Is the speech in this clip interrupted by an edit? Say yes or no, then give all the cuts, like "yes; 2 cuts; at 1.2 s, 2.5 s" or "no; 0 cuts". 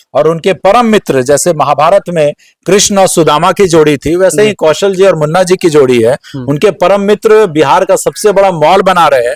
no; 0 cuts